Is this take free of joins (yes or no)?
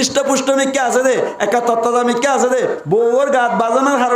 yes